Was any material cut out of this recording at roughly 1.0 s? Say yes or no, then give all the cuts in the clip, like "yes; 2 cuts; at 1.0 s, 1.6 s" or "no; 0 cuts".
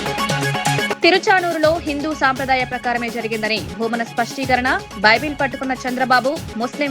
yes; 1 cut; at 1.0 s